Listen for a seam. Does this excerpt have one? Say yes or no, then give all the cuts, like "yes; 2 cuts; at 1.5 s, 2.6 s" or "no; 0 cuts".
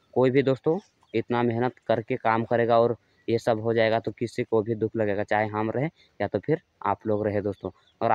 no; 0 cuts